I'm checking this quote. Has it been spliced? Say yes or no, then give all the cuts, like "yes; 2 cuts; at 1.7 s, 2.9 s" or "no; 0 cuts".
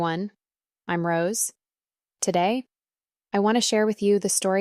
no; 0 cuts